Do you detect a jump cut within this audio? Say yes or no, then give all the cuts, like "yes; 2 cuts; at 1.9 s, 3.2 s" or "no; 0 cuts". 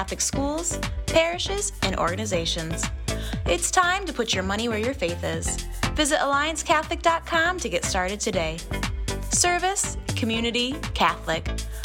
no; 0 cuts